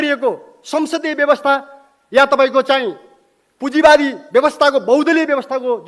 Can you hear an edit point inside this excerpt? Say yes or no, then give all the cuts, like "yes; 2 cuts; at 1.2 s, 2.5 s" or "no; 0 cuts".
no; 0 cuts